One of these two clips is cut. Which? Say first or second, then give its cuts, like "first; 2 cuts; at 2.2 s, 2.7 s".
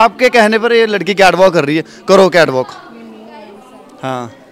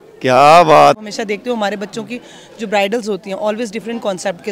second; 1 cut; at 1.0 s